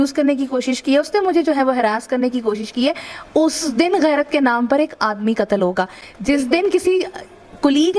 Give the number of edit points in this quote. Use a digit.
0